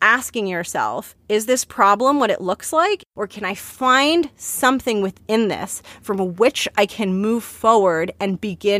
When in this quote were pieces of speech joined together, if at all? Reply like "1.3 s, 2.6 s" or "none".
1.1 s, 3.0 s